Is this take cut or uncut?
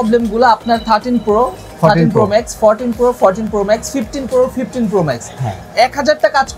uncut